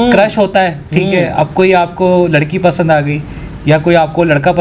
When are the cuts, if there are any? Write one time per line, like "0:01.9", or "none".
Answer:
none